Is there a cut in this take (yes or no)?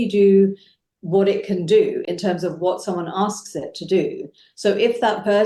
no